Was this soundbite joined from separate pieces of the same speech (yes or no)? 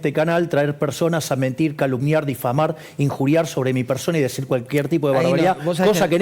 no